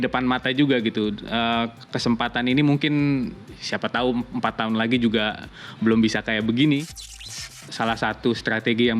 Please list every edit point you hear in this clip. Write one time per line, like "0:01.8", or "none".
0:07.3